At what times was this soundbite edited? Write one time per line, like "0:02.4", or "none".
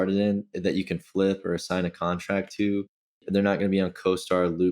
0:03.2